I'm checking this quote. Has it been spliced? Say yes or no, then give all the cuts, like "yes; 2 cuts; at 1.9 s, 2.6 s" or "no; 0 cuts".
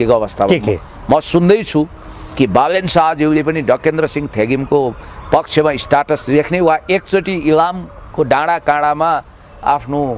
no; 0 cuts